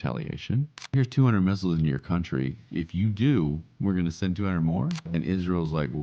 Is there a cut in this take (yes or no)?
yes